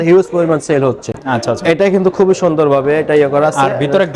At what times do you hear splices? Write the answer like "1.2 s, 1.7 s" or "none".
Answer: none